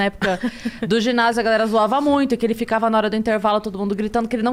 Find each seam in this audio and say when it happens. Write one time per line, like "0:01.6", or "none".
none